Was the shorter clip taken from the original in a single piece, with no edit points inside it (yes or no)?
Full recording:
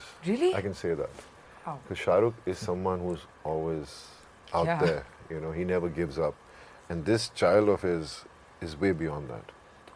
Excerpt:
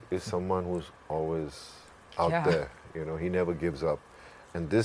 yes